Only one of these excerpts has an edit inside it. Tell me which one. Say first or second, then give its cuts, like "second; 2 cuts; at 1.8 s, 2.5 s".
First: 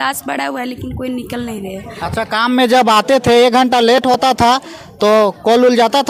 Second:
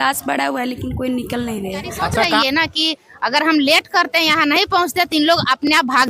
second; 1 cut; at 2.3 s